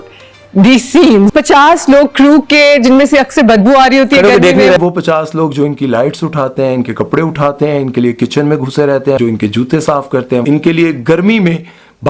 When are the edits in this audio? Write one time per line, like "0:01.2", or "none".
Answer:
0:01.3
0:04.8
0:09.2
0:10.4